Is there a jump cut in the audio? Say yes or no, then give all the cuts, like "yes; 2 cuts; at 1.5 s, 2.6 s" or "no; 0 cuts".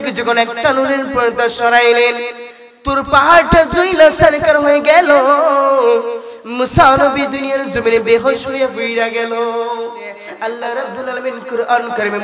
yes; 1 cut; at 10.3 s